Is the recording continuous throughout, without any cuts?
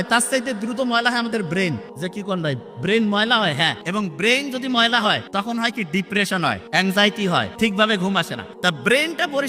no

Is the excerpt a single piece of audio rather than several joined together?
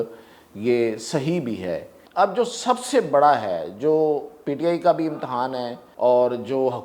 no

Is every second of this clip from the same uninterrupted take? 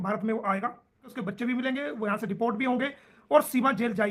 no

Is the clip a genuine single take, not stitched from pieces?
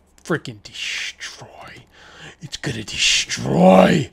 yes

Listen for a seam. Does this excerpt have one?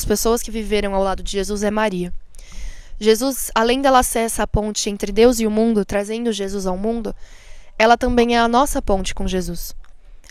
no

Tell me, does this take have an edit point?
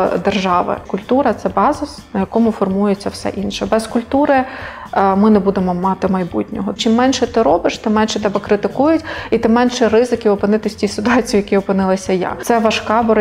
yes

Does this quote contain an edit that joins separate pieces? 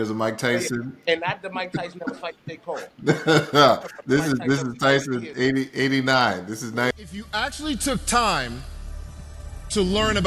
yes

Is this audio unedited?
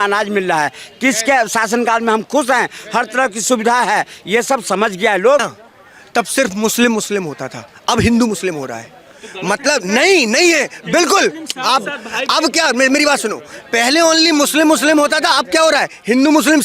no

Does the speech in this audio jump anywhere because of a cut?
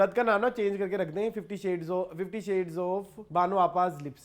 yes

